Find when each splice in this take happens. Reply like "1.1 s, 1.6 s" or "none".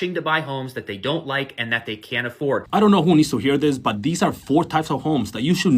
2.7 s

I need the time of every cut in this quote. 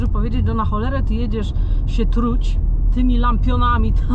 none

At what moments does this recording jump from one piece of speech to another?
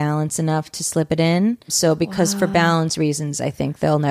1.7 s

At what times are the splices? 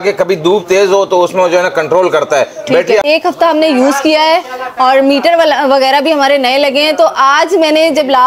3.0 s

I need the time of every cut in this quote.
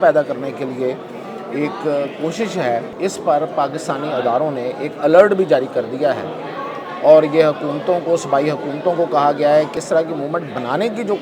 2.9 s, 9.8 s

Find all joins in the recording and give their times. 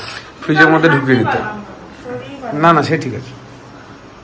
none

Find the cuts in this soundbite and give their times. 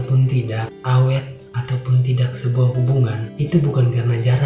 none

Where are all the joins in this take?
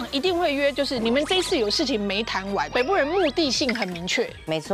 2.7 s

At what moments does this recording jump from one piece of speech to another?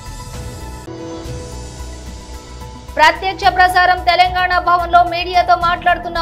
2.0 s

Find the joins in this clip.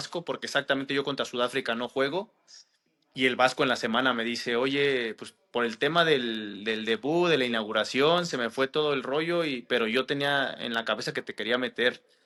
none

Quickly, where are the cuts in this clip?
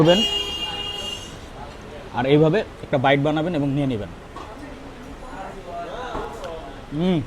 6.2 s

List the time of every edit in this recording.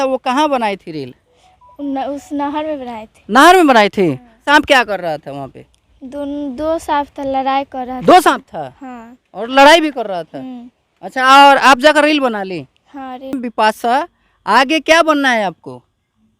4.4 s, 13.3 s

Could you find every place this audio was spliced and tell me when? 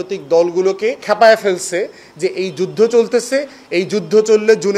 1.0 s

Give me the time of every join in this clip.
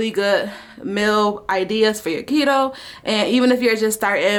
none

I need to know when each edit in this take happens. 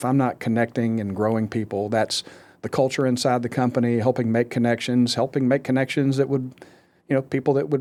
none

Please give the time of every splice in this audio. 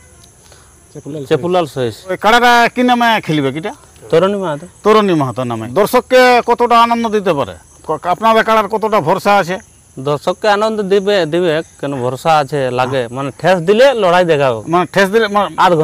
2.2 s, 5.7 s

